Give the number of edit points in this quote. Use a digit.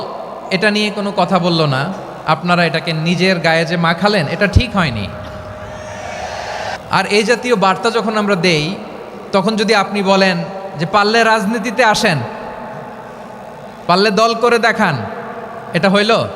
1